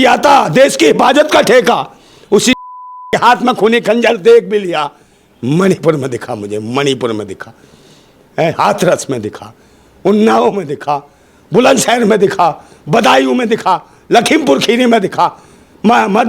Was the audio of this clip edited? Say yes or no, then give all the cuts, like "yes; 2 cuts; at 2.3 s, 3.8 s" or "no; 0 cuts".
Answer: no; 0 cuts